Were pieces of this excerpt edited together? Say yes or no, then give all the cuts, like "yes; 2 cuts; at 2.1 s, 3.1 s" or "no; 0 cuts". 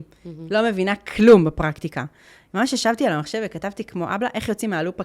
no; 0 cuts